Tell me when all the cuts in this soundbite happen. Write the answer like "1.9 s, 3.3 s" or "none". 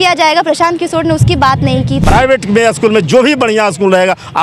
2.0 s